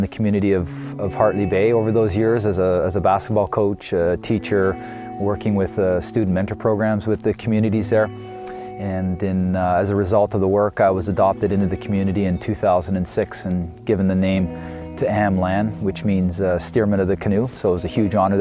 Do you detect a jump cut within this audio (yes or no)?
yes